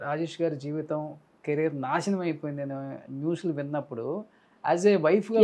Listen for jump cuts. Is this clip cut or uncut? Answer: uncut